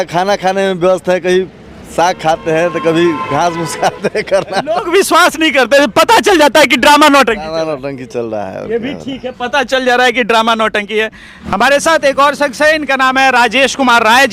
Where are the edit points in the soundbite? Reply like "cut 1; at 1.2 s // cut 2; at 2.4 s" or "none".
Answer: none